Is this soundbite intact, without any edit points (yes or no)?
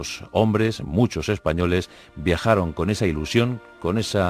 yes